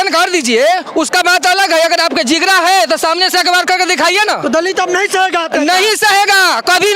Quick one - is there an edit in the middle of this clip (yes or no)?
no